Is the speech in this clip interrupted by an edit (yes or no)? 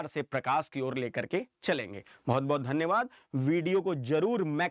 no